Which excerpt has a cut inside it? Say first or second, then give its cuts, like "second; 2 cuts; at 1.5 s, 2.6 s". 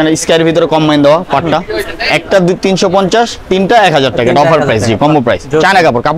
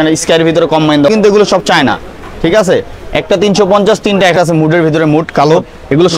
second; 2 cuts; at 1.1 s, 4.3 s